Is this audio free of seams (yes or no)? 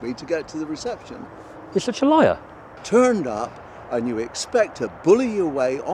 no